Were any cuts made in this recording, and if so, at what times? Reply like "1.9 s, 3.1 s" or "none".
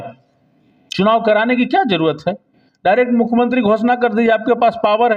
none